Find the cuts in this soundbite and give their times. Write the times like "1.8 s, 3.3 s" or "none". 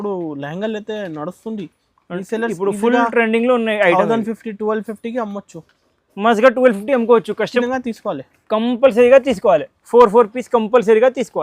7.6 s